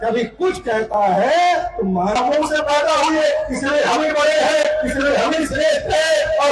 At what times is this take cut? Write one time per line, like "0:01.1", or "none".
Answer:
0:02.2